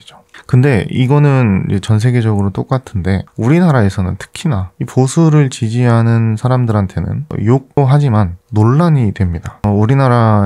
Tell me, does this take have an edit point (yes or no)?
yes